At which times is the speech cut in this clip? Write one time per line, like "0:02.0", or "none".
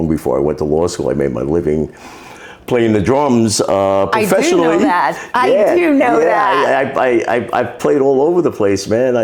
none